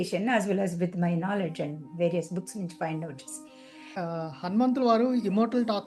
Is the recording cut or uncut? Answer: cut